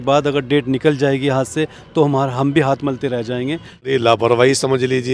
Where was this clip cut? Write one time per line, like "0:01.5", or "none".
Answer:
0:03.8